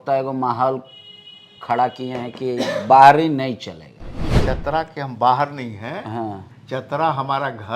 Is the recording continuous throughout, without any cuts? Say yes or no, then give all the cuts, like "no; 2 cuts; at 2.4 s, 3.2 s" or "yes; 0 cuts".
no; 1 cut; at 4.3 s